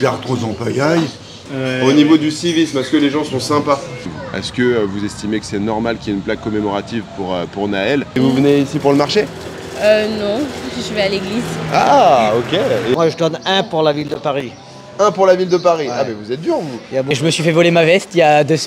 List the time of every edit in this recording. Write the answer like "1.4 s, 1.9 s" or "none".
1.5 s, 4.0 s, 8.1 s, 12.9 s, 17.1 s